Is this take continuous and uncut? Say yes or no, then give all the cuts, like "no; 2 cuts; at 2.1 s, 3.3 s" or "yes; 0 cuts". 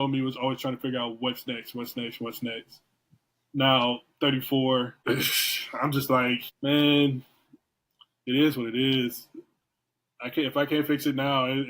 no; 2 cuts; at 4.9 s, 6.5 s